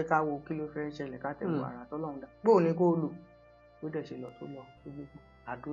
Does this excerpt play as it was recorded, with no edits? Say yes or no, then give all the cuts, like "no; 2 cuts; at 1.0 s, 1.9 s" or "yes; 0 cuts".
yes; 0 cuts